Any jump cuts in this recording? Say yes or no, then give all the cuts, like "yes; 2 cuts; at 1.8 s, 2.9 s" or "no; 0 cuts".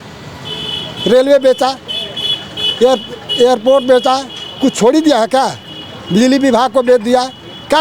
no; 0 cuts